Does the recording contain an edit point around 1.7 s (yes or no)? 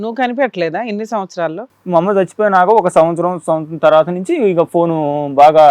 yes